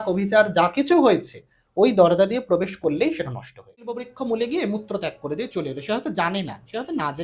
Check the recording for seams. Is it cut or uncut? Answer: cut